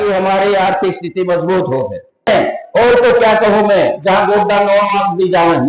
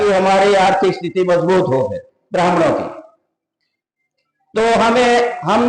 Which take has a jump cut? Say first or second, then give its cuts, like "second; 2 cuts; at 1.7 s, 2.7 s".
first; 1 cut; at 2.6 s